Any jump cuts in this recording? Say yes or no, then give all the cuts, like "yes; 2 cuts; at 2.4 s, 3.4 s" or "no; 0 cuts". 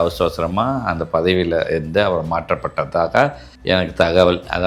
no; 0 cuts